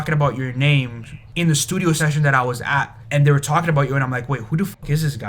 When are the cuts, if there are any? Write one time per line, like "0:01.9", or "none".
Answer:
0:01.2
0:03.0